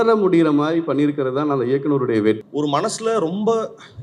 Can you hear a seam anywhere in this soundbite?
yes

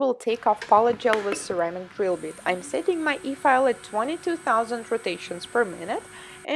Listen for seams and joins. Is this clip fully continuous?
yes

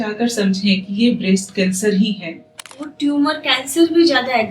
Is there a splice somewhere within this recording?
yes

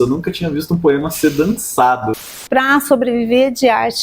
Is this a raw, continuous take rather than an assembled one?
no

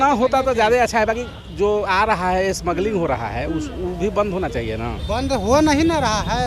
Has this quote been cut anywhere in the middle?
yes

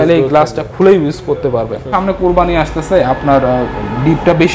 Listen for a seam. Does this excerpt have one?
yes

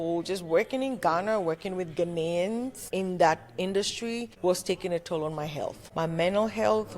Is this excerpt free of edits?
no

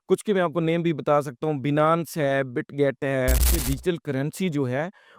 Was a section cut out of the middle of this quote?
yes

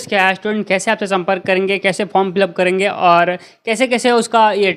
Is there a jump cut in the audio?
no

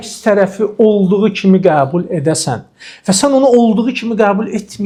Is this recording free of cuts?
yes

